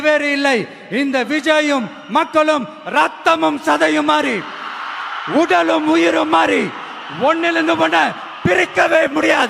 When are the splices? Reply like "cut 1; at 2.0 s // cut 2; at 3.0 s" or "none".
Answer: none